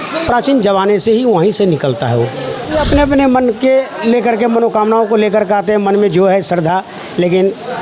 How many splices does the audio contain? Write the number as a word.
one